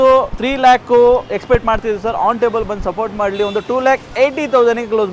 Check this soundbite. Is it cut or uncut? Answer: uncut